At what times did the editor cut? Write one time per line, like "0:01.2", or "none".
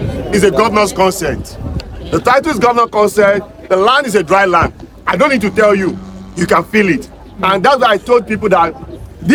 none